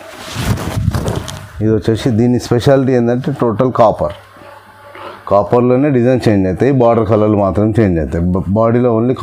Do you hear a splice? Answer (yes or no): no